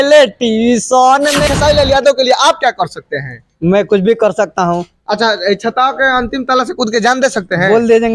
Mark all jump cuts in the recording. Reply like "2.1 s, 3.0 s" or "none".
1.4 s

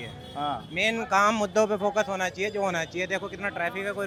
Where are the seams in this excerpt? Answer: none

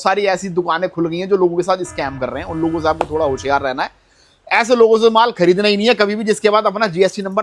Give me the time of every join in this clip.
none

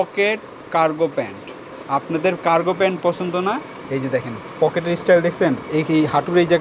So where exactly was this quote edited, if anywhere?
none

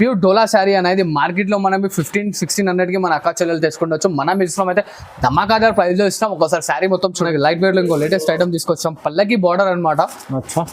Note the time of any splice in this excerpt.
7.3 s

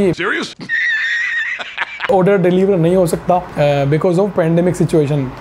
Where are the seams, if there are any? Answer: none

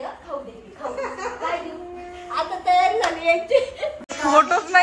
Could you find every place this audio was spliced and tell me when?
3.9 s

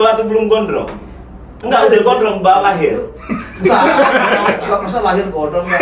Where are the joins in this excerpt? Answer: none

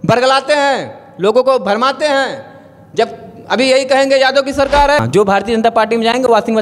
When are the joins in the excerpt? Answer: 5.0 s

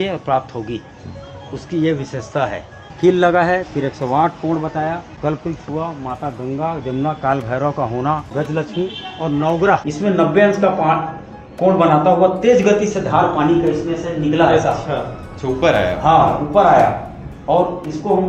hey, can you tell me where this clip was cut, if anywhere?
2.8 s, 5.1 s, 8.3 s, 9.9 s

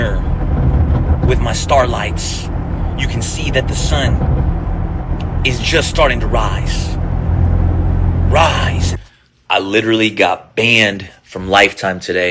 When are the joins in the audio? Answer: 9.0 s

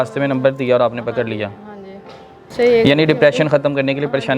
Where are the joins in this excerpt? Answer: 2.5 s

